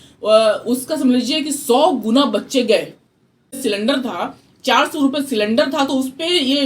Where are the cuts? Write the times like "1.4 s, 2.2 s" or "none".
3.6 s